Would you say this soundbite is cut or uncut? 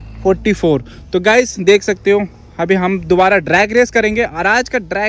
uncut